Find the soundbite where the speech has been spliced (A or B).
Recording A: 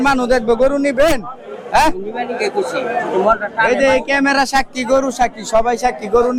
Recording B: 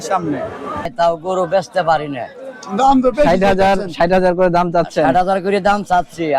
B